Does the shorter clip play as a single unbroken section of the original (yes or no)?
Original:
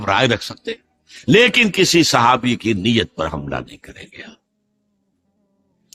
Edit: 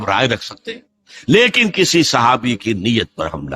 yes